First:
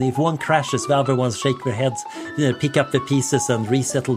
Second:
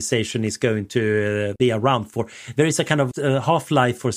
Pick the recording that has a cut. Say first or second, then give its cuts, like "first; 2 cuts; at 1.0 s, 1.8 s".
second; 2 cuts; at 1.5 s, 3.1 s